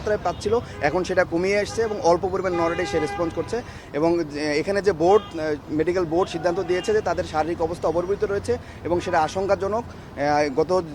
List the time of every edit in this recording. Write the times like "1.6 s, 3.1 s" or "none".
3.8 s

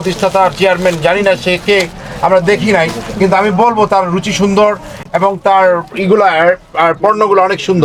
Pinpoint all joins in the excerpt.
none

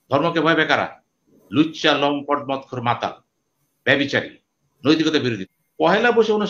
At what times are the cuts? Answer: 5.4 s

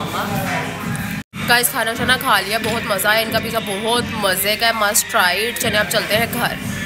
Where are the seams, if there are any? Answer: 1.3 s

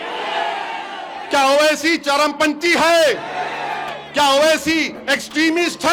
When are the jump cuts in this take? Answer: none

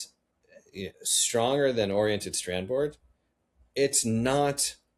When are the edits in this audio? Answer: none

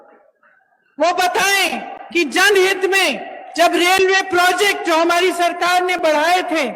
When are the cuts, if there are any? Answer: none

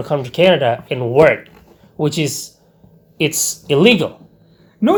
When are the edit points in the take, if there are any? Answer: none

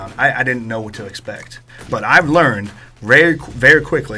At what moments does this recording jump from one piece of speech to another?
1.9 s

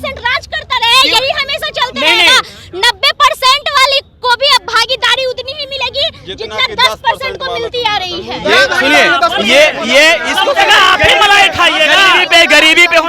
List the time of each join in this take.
none

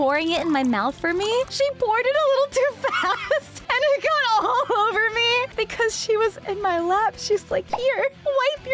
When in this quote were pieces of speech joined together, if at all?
1.5 s

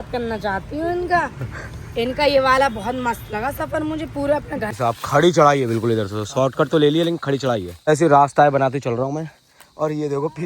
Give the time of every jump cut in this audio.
4.1 s, 7.7 s

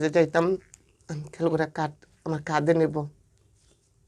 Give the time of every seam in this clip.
none

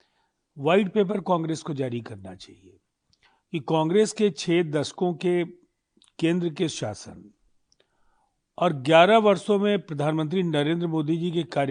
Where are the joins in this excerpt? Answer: none

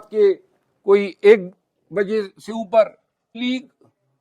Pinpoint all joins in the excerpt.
3.3 s

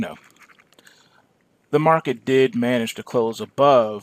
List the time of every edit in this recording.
3.0 s

